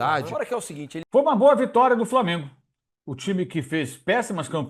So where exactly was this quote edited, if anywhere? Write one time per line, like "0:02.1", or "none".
0:01.0